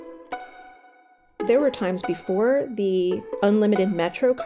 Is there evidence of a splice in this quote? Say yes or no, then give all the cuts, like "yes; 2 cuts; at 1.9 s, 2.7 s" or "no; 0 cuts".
yes; 2 cuts; at 1.4 s, 3.3 s